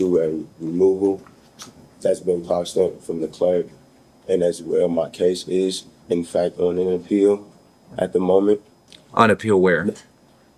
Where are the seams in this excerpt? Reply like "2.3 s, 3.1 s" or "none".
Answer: none